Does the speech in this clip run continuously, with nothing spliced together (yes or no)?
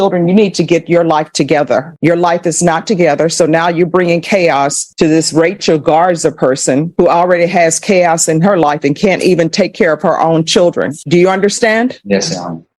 yes